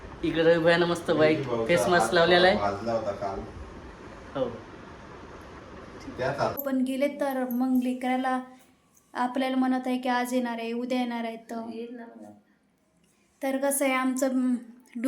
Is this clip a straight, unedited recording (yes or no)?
no